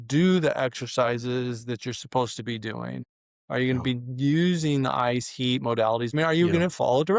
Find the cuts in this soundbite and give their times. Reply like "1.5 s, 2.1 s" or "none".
6.1 s